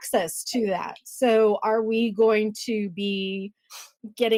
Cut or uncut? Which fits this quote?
uncut